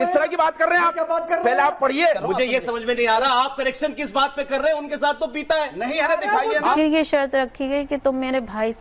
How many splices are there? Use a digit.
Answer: 2